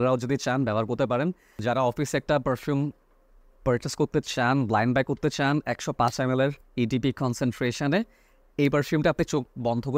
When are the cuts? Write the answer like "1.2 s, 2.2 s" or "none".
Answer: 1.6 s